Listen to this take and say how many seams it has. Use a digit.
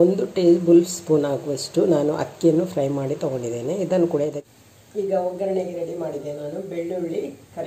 1